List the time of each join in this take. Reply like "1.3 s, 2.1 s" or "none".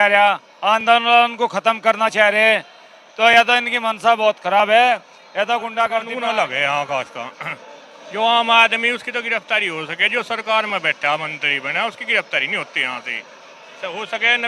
6.1 s